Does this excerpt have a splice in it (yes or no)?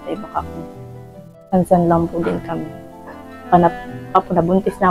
no